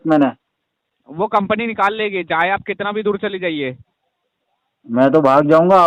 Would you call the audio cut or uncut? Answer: uncut